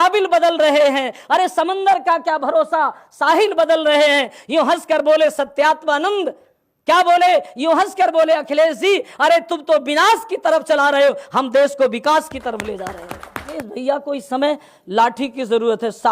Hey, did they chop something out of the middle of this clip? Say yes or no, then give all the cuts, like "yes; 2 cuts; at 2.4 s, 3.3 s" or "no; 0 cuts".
yes; 1 cut; at 13.5 s